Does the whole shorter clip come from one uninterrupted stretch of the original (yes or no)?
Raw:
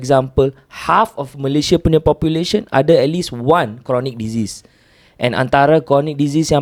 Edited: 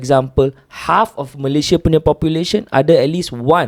yes